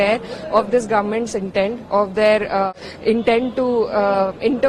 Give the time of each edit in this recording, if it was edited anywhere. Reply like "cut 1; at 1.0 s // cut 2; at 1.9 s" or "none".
cut 1; at 2.7 s